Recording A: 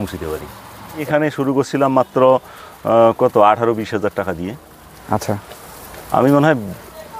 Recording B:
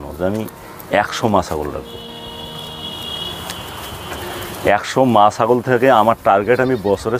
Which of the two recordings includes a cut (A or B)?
A